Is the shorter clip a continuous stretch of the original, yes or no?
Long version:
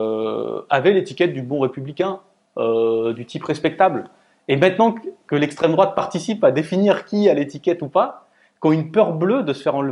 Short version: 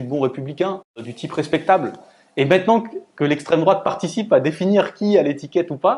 no